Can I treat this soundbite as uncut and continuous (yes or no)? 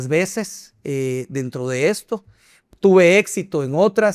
yes